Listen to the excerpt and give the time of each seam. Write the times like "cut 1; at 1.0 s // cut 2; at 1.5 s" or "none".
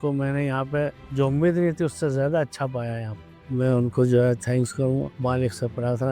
cut 1; at 1.0 s // cut 2; at 3.3 s